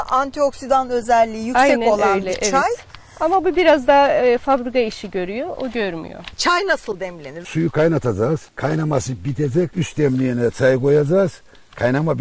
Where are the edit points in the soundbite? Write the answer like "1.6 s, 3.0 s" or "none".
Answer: 6.2 s